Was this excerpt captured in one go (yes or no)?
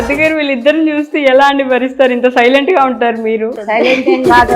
no